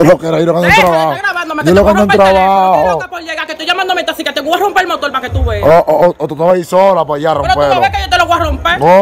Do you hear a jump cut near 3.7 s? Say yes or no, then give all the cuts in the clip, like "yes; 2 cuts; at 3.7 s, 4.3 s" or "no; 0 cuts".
no; 0 cuts